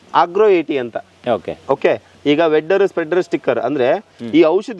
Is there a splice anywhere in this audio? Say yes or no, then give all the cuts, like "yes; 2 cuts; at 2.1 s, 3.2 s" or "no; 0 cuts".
no; 0 cuts